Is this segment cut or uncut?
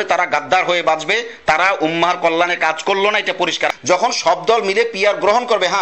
cut